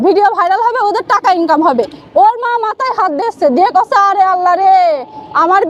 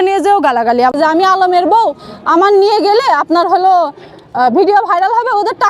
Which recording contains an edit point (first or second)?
second